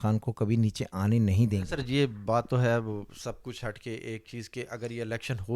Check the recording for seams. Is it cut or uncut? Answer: cut